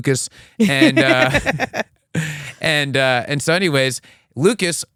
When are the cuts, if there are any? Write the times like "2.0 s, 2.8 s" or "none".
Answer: none